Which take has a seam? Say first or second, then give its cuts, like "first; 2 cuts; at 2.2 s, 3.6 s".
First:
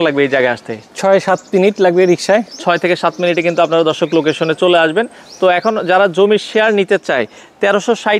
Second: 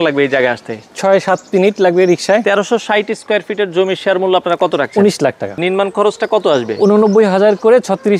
second; 2 cuts; at 2.4 s, 5.6 s